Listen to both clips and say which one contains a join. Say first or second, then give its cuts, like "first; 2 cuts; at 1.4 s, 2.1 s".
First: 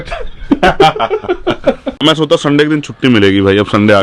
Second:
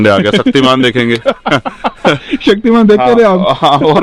first; 1 cut; at 2.0 s